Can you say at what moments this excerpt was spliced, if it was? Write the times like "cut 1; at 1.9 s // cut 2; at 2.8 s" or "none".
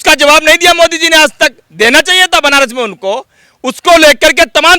none